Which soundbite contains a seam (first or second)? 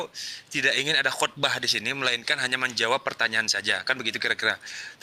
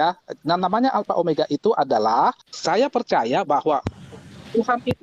second